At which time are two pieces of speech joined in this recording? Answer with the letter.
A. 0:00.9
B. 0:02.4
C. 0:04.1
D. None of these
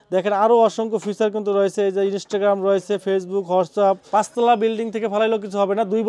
C